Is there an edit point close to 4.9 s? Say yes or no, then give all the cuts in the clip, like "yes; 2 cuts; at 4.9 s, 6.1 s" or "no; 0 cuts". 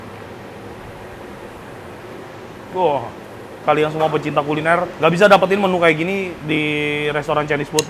yes; 3 cuts; at 3.6 s, 4.9 s, 6.4 s